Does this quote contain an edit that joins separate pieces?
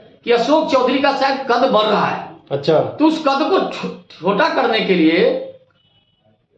no; 0 cuts

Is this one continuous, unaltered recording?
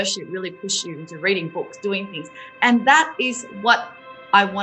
yes; 0 cuts

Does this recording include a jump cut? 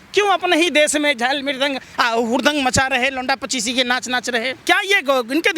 yes; 1 cut; at 4.6 s

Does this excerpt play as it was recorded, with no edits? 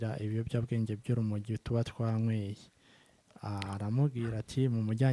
yes; 0 cuts

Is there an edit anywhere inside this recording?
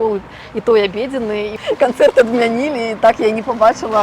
yes; 1 cut; at 1.6 s

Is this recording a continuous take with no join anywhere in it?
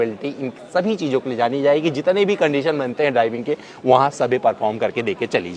yes; 0 cuts

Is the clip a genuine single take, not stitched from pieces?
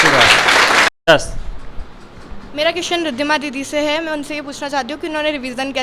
no; 1 cut; at 0.9 s

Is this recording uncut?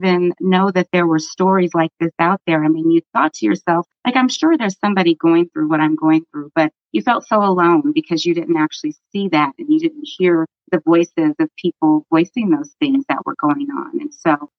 no; 1 cut; at 10.6 s

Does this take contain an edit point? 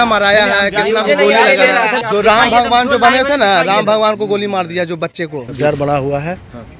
yes; 2 cuts; at 2.0 s, 5.4 s

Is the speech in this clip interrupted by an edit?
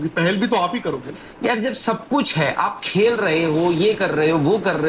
yes; 1 cut; at 1.2 s

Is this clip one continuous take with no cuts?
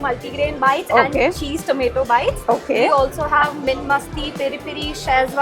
yes; 0 cuts

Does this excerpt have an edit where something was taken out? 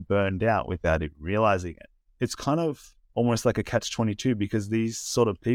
yes; 2 cuts; at 2.0 s, 2.9 s

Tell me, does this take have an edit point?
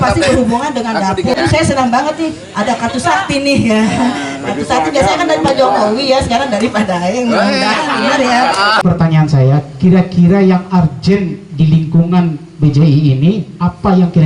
yes; 2 cuts; at 1.4 s, 8.8 s

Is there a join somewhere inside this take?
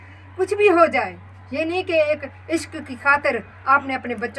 no; 0 cuts

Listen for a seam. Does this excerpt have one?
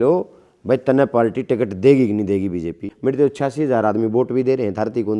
yes; 1 cut; at 2.9 s

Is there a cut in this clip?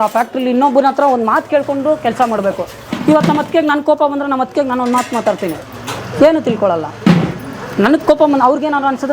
no; 0 cuts

